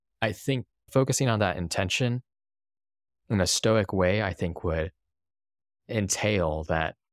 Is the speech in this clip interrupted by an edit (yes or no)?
yes